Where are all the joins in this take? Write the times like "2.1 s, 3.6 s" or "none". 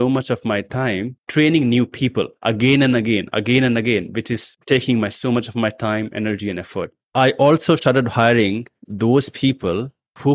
7.0 s